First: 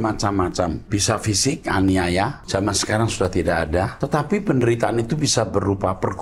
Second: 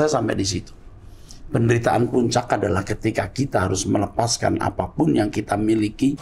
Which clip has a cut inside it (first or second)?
first